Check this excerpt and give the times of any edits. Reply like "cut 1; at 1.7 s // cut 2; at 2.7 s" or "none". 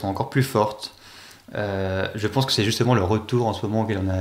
none